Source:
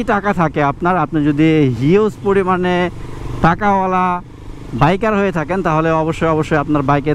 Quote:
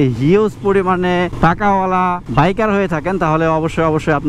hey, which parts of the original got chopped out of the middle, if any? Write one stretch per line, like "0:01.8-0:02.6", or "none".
0:02.9-0:03.3
0:04.2-0:04.7